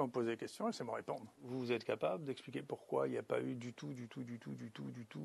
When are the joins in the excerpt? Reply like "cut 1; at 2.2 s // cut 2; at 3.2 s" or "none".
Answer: cut 1; at 1.5 s